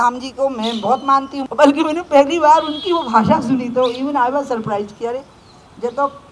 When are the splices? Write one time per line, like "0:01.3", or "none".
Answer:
0:01.4

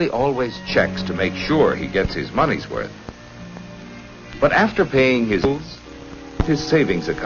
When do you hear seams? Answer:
0:04.4

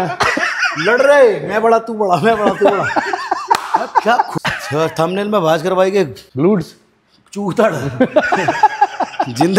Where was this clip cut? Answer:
0:04.3
0:06.2

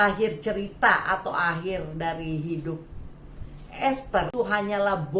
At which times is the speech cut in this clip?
0:04.3

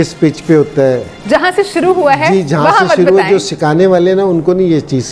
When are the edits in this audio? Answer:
none

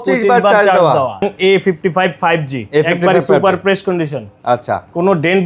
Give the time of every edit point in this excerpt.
0:01.3

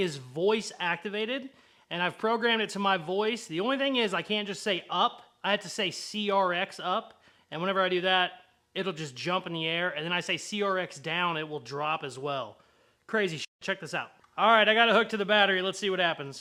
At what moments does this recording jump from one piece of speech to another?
none

